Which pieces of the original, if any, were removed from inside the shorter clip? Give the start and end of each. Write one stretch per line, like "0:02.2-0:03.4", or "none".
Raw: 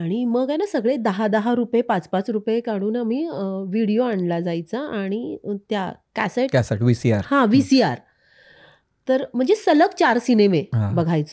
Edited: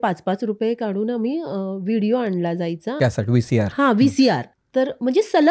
0:04.8-0:06.5
0:08.1-0:08.9

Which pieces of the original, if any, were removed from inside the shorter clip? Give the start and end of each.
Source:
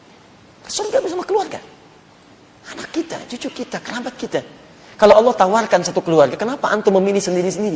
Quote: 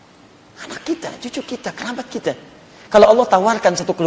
none

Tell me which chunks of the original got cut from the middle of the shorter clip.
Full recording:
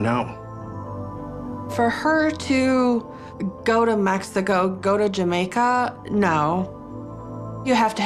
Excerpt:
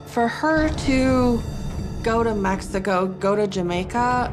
none

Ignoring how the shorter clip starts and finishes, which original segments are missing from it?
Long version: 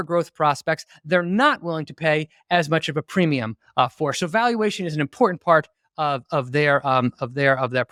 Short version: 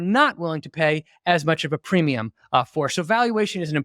none

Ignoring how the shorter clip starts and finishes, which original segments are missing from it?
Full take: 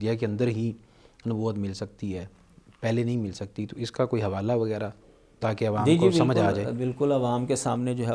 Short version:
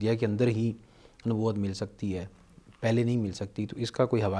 none

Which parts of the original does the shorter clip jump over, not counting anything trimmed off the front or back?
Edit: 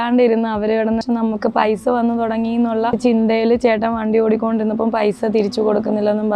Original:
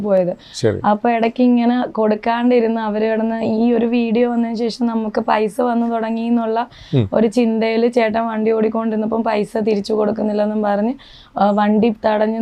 0:03.4-0:04.8
0:06.7-0:07.3

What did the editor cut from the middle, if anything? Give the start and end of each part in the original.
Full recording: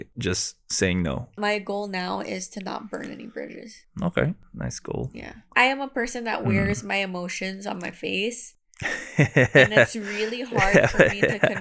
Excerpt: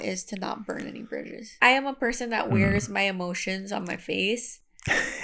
0:03.6-0:05.3

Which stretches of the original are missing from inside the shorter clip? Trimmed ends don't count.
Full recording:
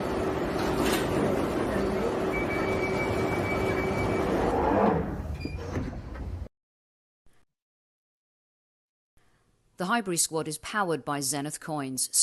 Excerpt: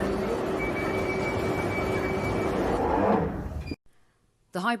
0:05.6-0:09.1

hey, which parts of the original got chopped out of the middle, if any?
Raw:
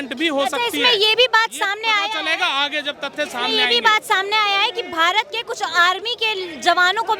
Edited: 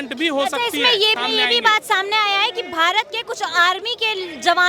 0:01.1-0:03.3

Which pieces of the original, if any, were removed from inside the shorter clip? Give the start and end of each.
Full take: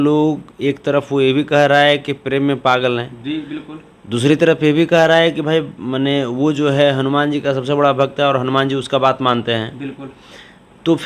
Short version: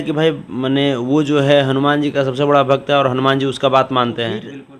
none

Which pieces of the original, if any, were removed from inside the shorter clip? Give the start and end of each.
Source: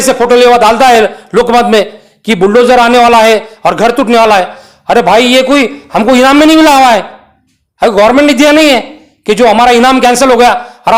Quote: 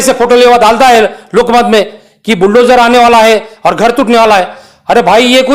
none

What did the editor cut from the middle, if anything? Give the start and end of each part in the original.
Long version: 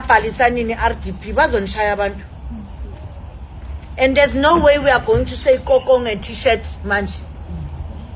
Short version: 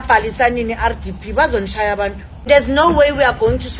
0:02.5-0:04.1

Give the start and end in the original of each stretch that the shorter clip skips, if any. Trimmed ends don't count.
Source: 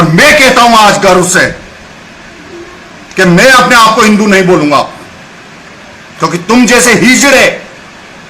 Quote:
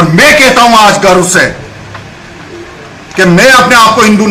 none

